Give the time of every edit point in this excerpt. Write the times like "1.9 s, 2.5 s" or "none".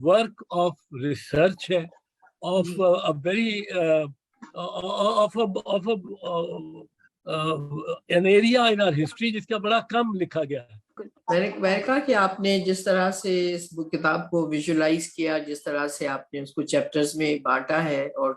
10.9 s